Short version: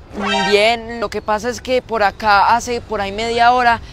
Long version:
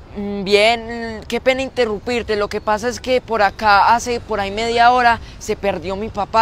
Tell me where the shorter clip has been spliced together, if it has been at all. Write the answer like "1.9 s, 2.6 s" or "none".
1.0 s